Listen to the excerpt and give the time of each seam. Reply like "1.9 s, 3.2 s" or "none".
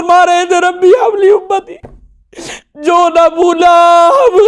none